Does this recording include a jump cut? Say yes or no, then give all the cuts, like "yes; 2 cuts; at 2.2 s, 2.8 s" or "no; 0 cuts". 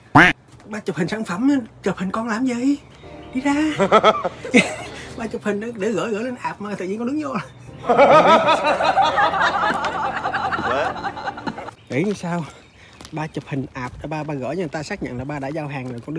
yes; 1 cut; at 11.7 s